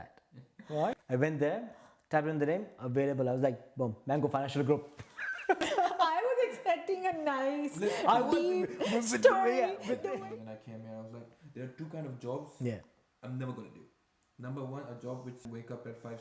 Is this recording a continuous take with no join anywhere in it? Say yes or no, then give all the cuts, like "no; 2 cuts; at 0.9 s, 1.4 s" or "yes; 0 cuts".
no; 4 cuts; at 1.0 s, 5.6 s, 10.1 s, 15.5 s